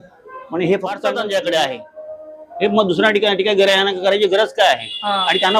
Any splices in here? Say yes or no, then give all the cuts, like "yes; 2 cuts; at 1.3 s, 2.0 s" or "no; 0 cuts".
yes; 1 cut; at 1.1 s